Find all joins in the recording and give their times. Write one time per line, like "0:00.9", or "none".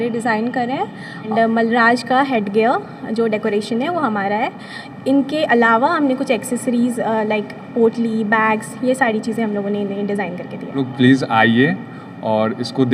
0:01.3
0:10.8